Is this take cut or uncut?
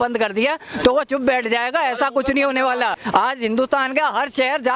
cut